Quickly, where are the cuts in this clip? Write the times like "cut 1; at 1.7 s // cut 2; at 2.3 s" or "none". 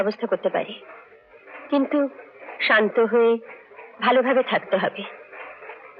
none